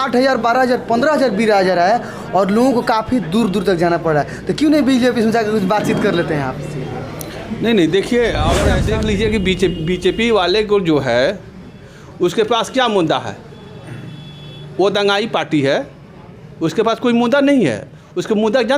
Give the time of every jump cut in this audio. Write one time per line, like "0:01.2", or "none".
0:08.8

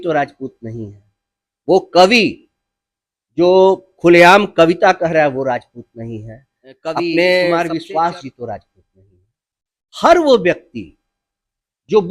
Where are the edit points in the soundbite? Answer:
0:07.5

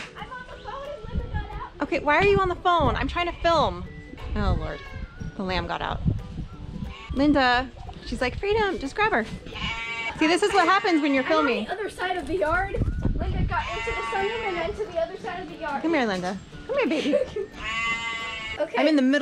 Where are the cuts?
none

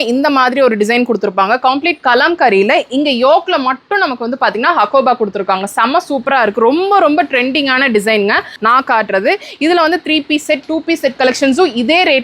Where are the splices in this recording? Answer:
0:08.5

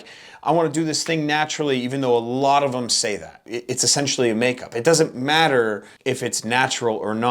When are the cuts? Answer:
0:03.5
0:05.9

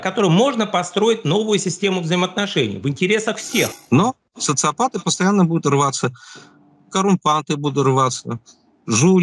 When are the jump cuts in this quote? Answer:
0:03.8

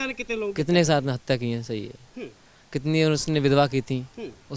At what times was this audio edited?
none

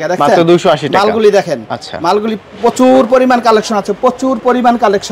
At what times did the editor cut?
none

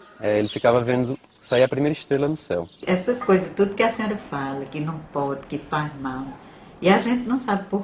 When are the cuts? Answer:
0:02.8

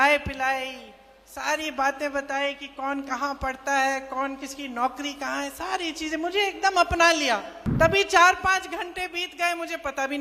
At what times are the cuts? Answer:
0:07.6

